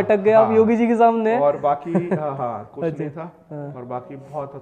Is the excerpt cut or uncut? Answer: uncut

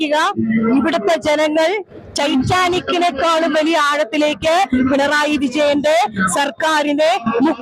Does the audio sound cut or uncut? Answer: uncut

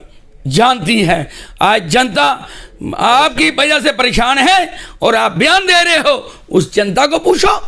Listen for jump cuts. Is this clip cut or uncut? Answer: uncut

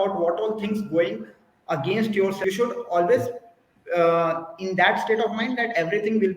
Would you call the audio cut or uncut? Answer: cut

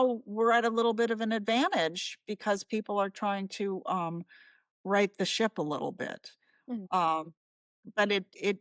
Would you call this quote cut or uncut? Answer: uncut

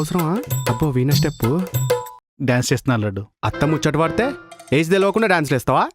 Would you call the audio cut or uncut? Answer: cut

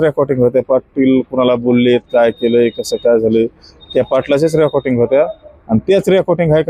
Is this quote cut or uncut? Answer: uncut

